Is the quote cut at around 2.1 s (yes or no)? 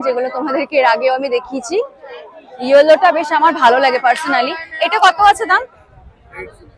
no